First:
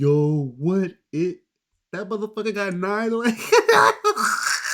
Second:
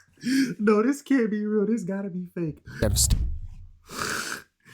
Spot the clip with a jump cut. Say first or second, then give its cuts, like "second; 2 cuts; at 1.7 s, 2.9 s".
second; 1 cut; at 2.7 s